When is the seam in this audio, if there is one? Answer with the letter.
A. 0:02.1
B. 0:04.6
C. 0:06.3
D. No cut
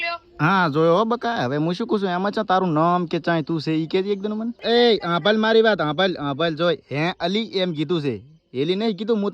B